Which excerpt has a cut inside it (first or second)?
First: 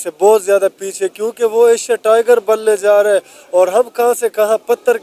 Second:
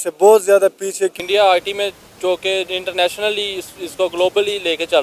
second